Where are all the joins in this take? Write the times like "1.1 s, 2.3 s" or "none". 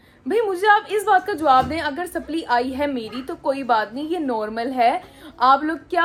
none

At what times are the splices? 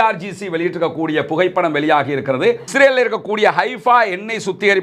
2.7 s

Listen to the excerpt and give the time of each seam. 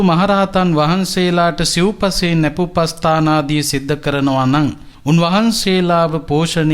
4.9 s

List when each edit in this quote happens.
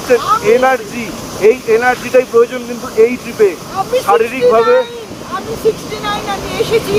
none

